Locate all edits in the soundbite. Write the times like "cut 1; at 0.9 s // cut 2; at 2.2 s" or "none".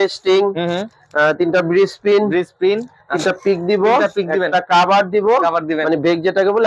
none